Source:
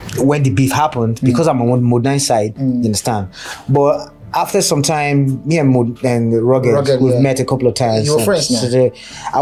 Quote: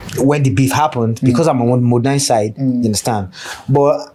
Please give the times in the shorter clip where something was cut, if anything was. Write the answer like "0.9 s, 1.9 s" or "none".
none